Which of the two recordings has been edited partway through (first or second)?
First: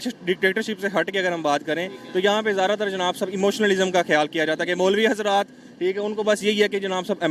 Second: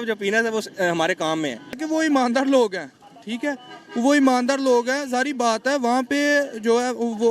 second